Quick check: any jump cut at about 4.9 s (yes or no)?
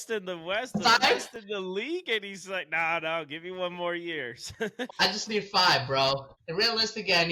yes